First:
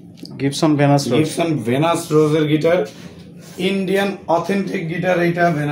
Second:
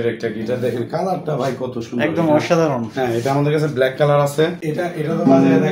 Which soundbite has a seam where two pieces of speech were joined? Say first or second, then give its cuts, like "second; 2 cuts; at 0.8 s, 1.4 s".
second; 1 cut; at 4.6 s